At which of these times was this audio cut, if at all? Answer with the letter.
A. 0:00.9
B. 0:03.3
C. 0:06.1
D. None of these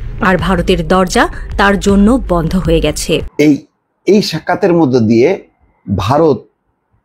B